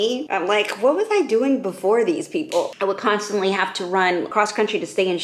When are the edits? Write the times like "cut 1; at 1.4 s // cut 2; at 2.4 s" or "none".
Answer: cut 1; at 2.7 s // cut 2; at 4.3 s

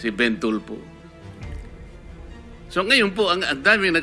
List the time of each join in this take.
cut 1; at 1.0 s // cut 2; at 2.7 s

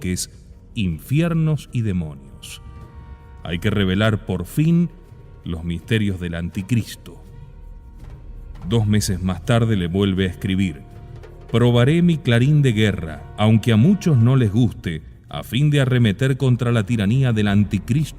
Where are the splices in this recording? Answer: cut 1; at 11.4 s

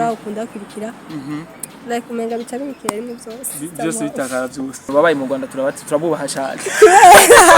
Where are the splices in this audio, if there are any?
cut 1; at 4.9 s

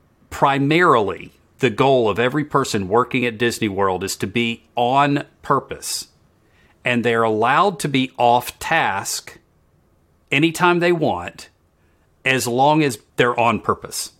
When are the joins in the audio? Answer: cut 1; at 13.0 s

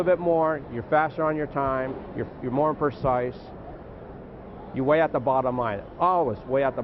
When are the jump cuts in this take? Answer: none

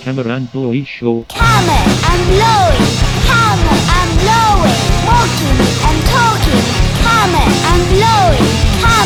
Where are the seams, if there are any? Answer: none

